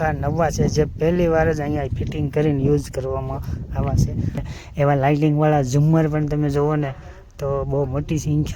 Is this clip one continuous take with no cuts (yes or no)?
no